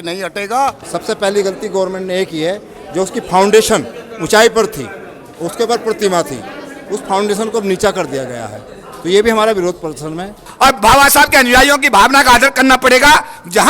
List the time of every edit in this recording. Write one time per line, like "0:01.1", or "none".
0:00.9
0:10.4